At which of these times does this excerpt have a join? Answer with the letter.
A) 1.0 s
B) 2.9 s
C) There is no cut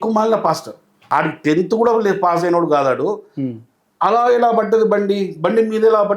A